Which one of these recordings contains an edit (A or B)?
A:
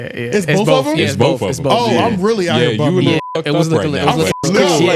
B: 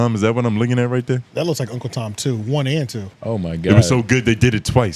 B